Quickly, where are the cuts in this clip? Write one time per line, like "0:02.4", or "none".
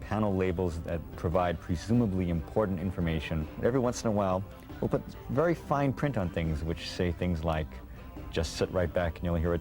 0:01.1
0:03.5